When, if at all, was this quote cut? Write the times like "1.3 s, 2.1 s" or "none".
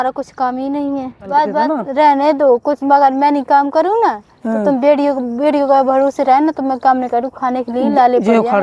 1.1 s